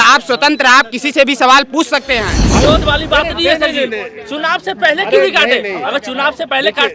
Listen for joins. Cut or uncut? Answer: cut